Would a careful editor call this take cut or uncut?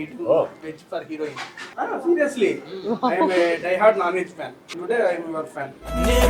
cut